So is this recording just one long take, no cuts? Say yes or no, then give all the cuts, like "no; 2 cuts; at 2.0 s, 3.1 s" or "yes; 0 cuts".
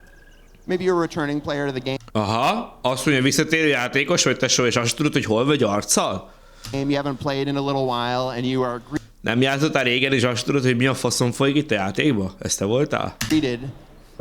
no; 1 cut; at 2.0 s